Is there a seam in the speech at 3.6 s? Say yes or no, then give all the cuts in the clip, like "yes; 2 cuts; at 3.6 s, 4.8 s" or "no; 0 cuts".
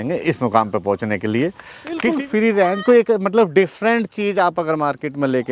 no; 1 cut; at 2.1 s